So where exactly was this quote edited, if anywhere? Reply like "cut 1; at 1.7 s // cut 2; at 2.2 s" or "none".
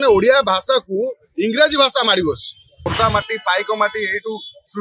cut 1; at 2.8 s